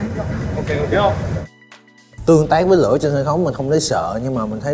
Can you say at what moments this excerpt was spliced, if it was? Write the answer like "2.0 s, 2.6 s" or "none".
2.1 s

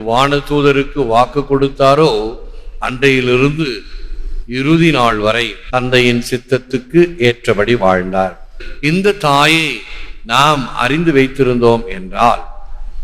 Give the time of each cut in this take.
5.5 s, 8.6 s

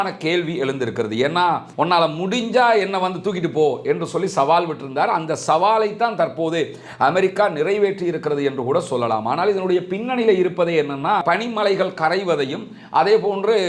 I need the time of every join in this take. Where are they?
1.7 s, 11.2 s

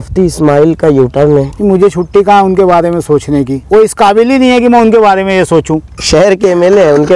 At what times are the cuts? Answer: 1.5 s, 3.6 s, 5.9 s

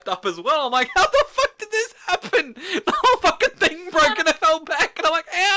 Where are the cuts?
none

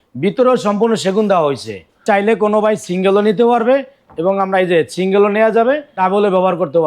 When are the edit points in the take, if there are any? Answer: 2.0 s, 6.0 s

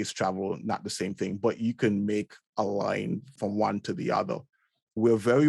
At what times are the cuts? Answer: 3.3 s

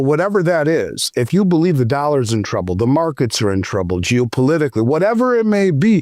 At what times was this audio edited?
none

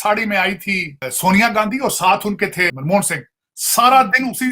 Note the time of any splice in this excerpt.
1.1 s, 2.7 s

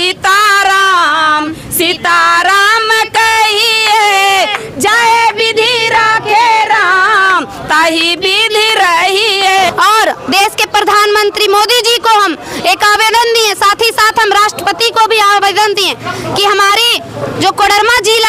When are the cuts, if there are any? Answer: 9.7 s

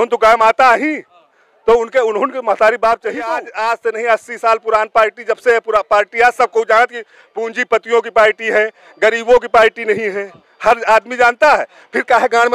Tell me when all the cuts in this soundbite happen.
3.4 s

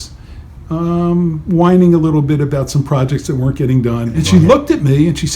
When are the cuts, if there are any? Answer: 4.1 s

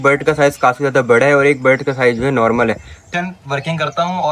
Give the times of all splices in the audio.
2.9 s

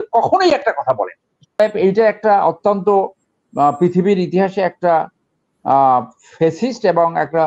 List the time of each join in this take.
1.6 s

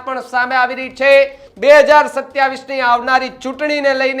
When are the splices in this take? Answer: 1.4 s

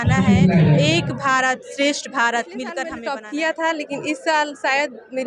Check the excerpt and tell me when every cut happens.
2.9 s

